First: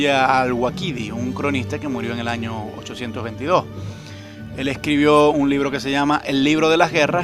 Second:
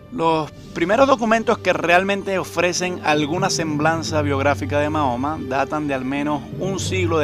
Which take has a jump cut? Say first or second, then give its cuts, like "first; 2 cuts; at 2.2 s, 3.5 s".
second; 1 cut; at 4.3 s